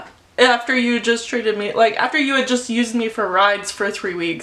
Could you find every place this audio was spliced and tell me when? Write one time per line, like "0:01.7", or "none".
none